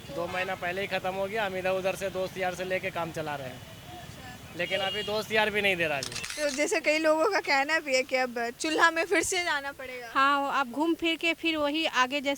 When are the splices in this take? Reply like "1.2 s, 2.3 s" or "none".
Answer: 6.2 s